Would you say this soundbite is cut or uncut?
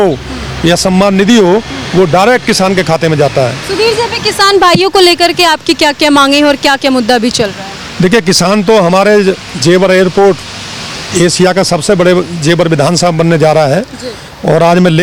uncut